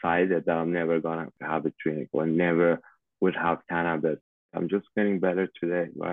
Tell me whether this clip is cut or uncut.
cut